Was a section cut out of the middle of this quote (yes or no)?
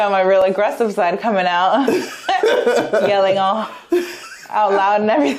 no